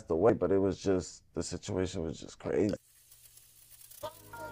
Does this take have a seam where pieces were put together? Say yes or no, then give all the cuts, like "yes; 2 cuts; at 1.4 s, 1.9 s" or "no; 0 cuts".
yes; 1 cut; at 2.9 s